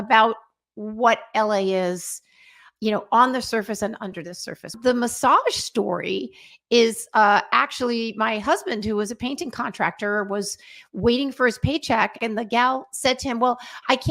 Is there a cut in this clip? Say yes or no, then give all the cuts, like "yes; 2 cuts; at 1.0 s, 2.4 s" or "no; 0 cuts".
yes; 2 cuts; at 4.7 s, 12.2 s